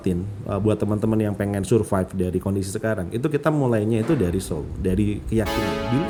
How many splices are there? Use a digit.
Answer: 0